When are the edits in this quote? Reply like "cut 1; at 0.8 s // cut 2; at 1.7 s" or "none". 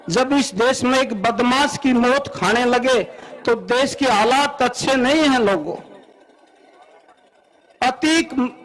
none